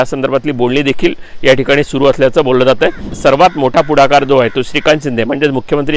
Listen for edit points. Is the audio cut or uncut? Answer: cut